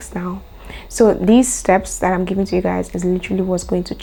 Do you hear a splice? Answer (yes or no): no